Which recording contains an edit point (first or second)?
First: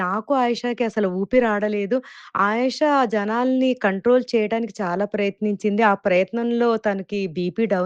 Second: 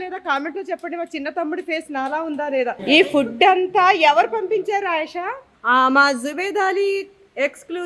second